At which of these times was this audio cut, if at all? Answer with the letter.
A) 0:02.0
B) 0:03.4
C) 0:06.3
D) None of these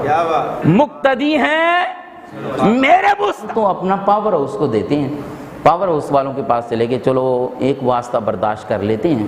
B